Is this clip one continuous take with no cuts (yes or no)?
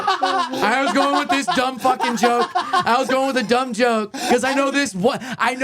no